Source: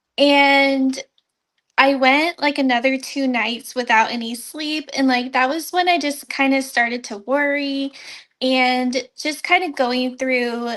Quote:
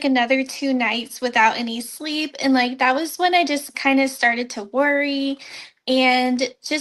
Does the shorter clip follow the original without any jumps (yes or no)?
yes